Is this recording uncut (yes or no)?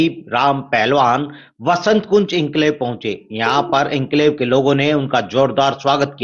yes